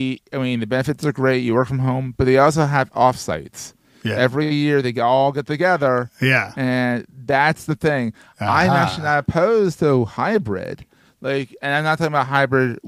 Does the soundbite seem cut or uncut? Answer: uncut